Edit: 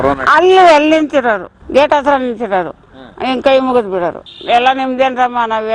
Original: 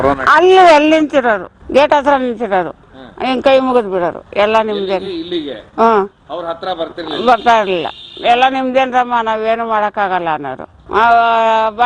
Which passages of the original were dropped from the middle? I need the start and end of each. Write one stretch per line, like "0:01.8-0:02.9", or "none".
0:04.2-0:08.0